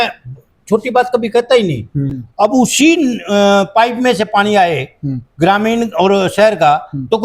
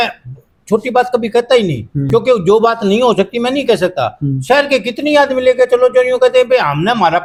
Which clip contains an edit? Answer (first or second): first